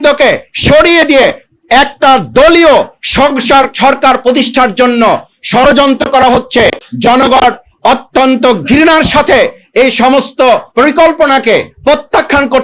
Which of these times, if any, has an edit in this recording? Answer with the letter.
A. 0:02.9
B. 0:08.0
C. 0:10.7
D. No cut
C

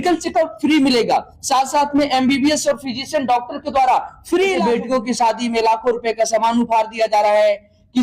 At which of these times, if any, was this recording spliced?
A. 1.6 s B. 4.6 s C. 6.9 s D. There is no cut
B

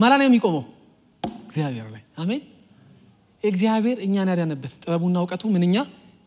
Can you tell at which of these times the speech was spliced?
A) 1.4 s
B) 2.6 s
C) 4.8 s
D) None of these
D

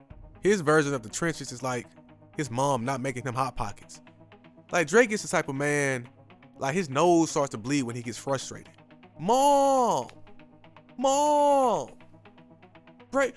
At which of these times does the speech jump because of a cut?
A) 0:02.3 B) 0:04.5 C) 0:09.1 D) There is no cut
C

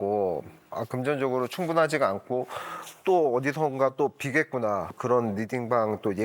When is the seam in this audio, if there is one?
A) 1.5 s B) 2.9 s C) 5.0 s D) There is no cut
C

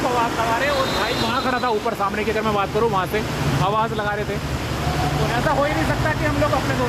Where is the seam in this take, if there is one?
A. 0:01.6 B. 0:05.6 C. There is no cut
C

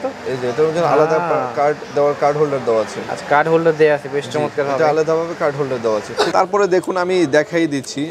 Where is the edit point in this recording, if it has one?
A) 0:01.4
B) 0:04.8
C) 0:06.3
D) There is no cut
C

